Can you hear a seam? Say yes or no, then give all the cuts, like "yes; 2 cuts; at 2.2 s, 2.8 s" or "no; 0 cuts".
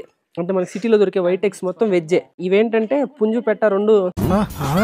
yes; 1 cut; at 2.4 s